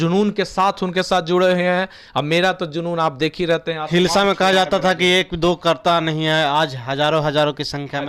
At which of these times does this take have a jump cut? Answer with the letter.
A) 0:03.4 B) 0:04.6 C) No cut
C